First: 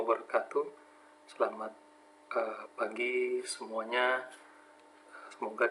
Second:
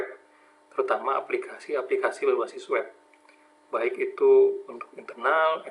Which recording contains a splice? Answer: second; 1 cut; at 1.8 s

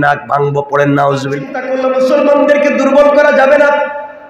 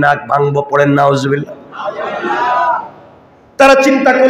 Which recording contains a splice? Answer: first; 1 cut; at 1.6 s

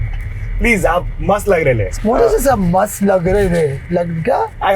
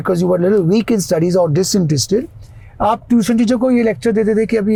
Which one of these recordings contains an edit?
first; 1 cut; at 1.9 s

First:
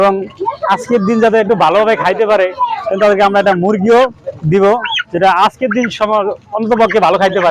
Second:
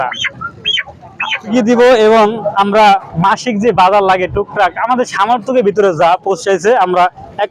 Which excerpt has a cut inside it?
second; 1 cut; at 1.5 s

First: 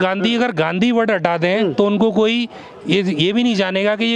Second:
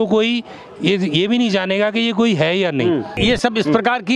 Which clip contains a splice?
second; 1 cut; at 3.2 s

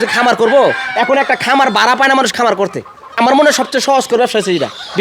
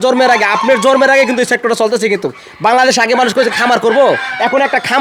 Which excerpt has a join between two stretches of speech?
first; 1 cut; at 3.2 s

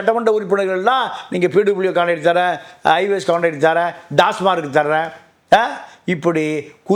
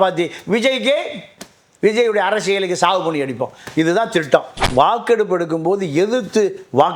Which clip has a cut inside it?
second; 1 cut; at 4.6 s

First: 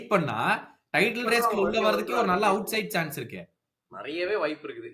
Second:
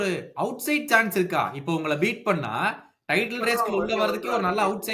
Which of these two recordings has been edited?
first; 1 cut; at 3.9 s

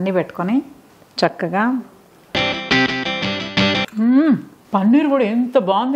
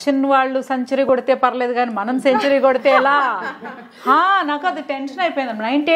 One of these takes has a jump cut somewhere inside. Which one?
first; 2 cuts; at 3.9 s, 4.5 s

